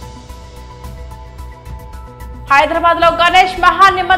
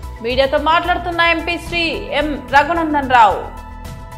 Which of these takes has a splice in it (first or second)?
first